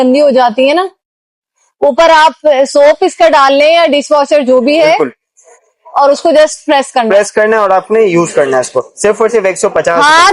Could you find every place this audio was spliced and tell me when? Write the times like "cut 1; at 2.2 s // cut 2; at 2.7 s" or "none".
none